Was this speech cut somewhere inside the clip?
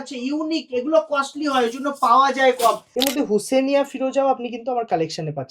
yes; 1 cut; at 2.9 s

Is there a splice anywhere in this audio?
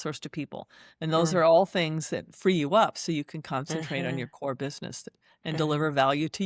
no; 0 cuts

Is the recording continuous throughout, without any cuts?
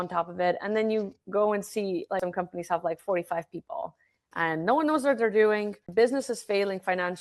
no; 2 cuts; at 2.2 s, 5.8 s

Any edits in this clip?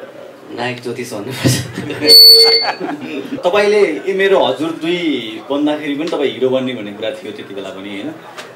yes; 1 cut; at 3.4 s

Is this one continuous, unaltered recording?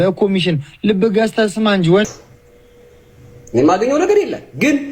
no; 1 cut; at 2.0 s

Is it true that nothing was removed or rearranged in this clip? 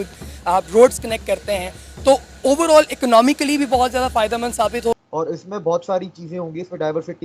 no; 1 cut; at 5.0 s

